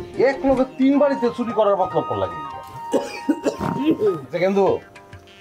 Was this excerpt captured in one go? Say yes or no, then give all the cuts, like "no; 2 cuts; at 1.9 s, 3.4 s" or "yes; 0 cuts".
no; 1 cut; at 4.3 s